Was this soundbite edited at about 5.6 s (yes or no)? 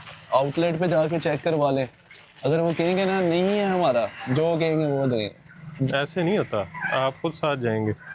no